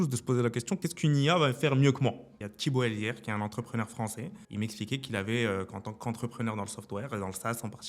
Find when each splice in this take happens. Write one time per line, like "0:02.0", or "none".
0:00.8
0:02.3
0:04.4

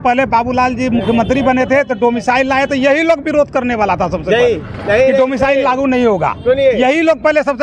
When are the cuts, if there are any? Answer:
none

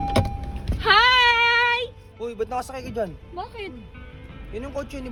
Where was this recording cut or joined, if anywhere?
none

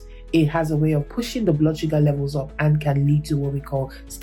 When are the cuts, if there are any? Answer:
none

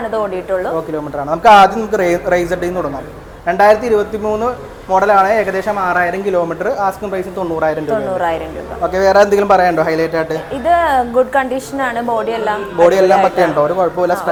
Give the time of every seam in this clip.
none

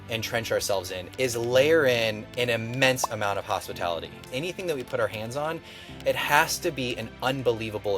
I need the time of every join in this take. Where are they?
0:01.0
0:02.2
0:04.3

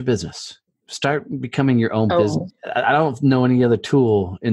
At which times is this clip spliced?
0:02.5

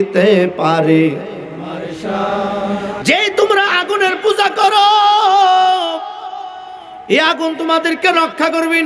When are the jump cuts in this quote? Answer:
0:03.0

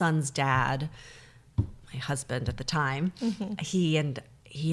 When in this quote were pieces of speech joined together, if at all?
none

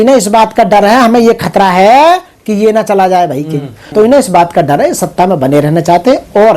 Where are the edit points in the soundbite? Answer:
0:03.9

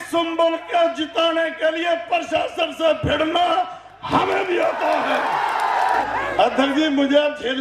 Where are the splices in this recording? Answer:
0:06.0

